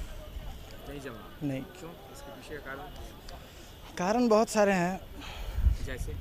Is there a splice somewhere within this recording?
no; 0 cuts

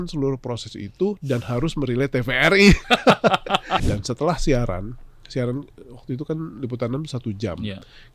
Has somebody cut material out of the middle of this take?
yes; 1 cut; at 3.8 s

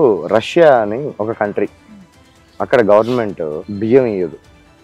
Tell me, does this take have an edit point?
yes; 2 cuts; at 1.1 s, 3.6 s

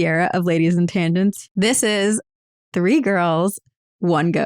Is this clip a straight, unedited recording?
no; 1 cut; at 1.4 s

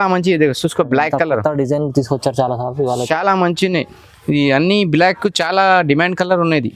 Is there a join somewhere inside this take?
no; 0 cuts

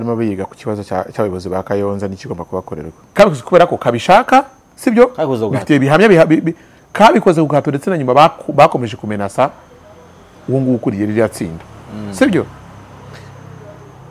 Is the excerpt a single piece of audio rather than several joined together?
no; 1 cut; at 3.0 s

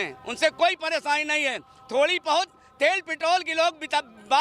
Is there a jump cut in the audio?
no; 0 cuts

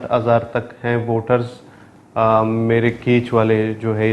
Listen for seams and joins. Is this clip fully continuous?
yes; 0 cuts

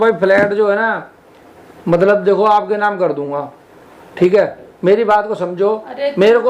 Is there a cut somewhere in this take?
no; 0 cuts

